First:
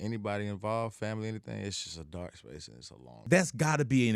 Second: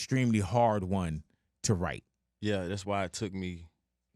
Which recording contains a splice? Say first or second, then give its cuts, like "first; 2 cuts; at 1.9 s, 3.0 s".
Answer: first; 1 cut; at 3.2 s